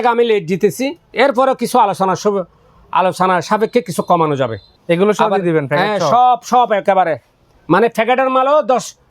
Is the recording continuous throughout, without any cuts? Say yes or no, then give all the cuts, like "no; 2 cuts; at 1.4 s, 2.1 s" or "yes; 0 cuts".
no; 1 cut; at 4.8 s